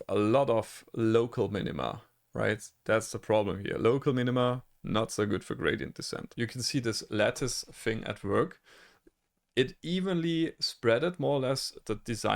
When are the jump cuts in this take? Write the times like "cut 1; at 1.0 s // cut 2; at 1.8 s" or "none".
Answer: cut 1; at 6.2 s